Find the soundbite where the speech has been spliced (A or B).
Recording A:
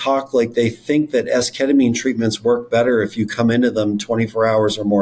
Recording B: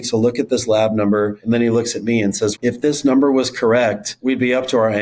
B